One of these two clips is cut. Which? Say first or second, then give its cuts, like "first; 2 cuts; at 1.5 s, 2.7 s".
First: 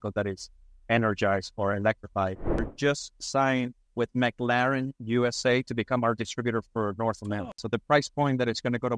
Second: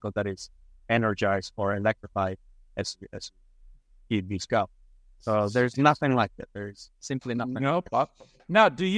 first; 3 cuts; at 2.7 s, 3.8 s, 7.5 s